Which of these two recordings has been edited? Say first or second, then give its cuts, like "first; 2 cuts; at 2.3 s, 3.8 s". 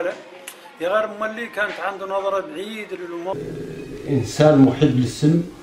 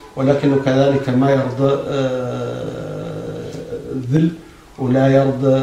first; 1 cut; at 3.3 s